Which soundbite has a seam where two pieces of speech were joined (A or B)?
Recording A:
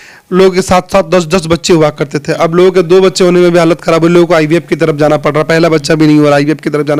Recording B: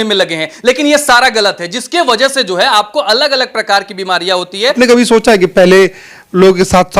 B